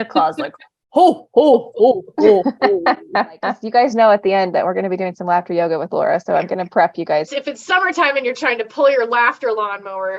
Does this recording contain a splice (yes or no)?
yes